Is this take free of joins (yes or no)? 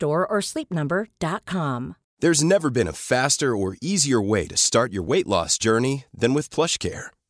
no